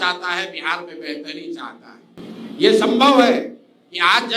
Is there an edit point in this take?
no; 0 cuts

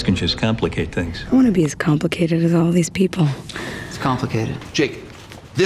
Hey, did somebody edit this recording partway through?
yes; 2 cuts; at 1.1 s, 3.8 s

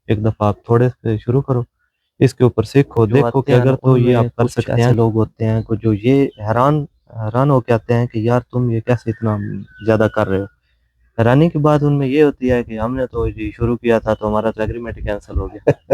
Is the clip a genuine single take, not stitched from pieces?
no; 1 cut; at 4.9 s

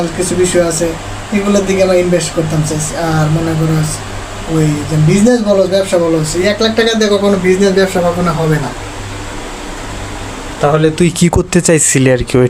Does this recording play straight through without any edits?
yes; 0 cuts

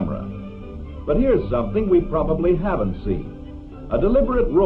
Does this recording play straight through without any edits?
yes; 0 cuts

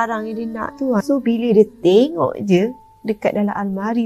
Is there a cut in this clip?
yes; 1 cut; at 1.0 s

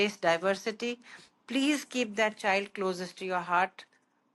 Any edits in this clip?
no; 0 cuts

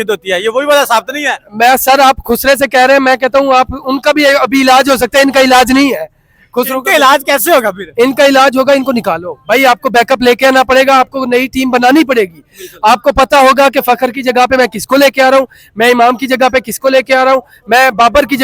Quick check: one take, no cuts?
yes; 0 cuts

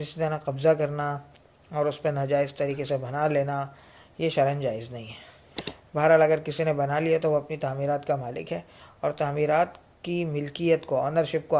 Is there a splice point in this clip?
yes; 1 cut; at 5.6 s

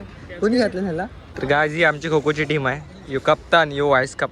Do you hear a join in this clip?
yes; 1 cut; at 1.3 s

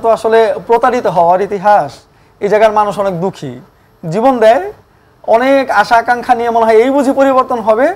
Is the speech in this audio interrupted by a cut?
no; 0 cuts

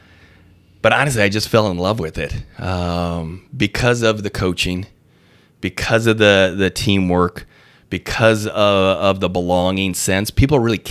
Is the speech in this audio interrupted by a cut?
no; 0 cuts

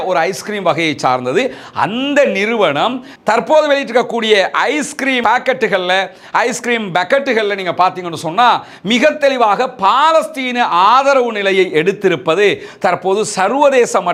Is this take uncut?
yes; 0 cuts

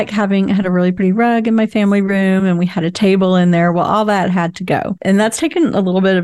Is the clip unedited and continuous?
no; 1 cut; at 5.0 s

